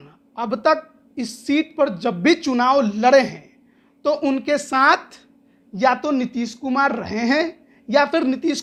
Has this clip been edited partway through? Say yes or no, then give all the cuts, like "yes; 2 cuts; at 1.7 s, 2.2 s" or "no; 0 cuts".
no; 0 cuts